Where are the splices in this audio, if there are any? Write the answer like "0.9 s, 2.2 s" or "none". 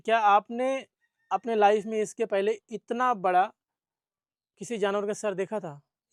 none